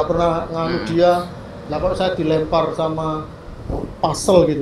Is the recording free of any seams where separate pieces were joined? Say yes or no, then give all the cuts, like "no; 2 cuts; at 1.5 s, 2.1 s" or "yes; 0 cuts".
yes; 0 cuts